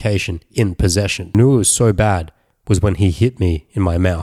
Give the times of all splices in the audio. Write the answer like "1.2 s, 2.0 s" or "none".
1.3 s

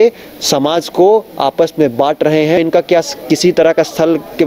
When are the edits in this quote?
2.6 s

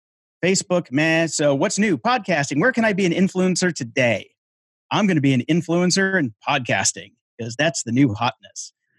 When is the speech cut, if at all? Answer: none

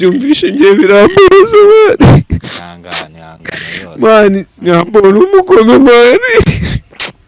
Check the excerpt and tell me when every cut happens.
4.5 s

